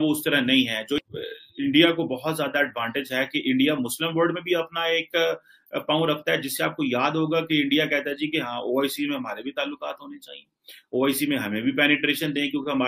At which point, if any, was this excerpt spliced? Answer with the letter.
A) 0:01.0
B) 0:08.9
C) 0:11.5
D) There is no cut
A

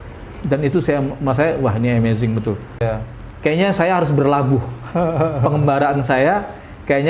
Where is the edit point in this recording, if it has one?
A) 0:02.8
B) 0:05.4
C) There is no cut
A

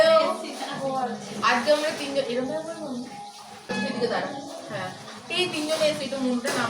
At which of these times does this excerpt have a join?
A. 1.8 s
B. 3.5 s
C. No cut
B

